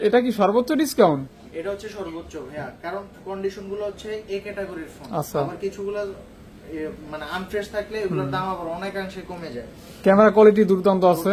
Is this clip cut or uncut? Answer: uncut